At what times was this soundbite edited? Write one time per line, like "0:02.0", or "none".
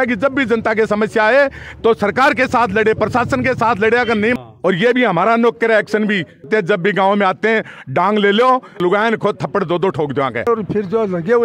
0:04.4
0:06.5
0:08.8
0:10.5

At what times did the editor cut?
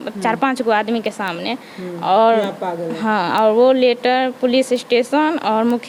none

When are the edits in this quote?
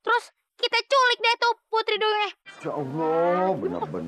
0:02.5

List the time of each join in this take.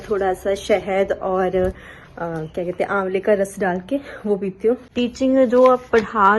0:04.8

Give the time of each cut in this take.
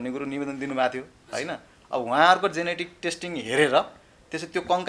none

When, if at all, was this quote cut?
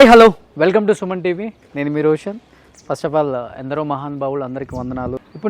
none

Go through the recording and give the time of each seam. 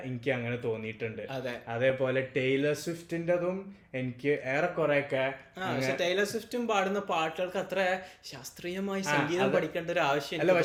none

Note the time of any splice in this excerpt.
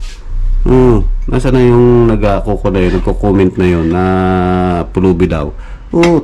none

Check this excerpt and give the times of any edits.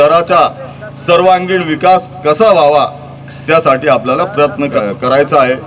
0:04.7

